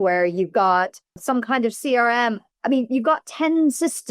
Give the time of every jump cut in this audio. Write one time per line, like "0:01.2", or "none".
0:01.2